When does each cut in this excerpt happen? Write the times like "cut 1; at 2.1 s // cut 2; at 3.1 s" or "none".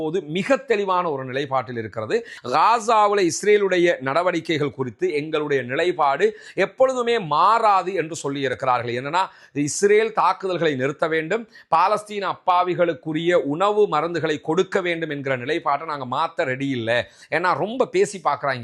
cut 1; at 2.3 s